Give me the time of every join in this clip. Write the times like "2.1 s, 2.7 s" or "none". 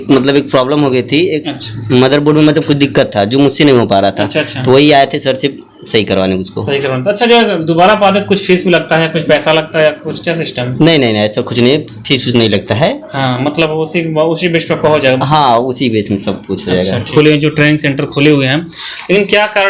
17.1 s